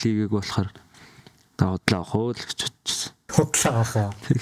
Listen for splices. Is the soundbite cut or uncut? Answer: uncut